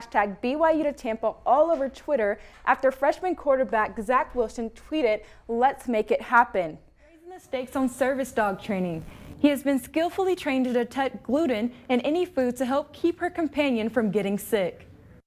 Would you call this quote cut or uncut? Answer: cut